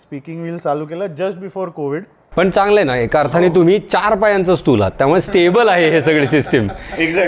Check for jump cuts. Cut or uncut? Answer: cut